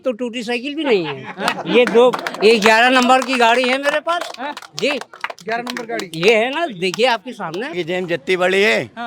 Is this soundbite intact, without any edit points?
no; 1 cut; at 7.7 s

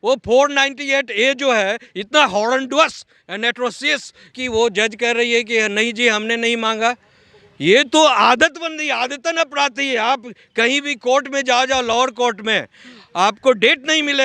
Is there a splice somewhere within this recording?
yes; 1 cut; at 4.3 s

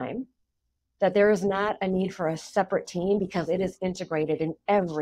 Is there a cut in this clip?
no; 0 cuts

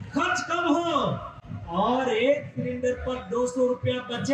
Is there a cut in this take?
no; 0 cuts

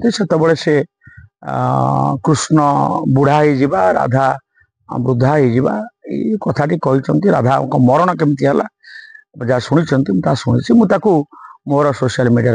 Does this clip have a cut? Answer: no; 0 cuts

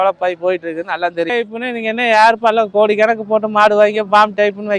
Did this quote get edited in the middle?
yes; 1 cut; at 1.4 s

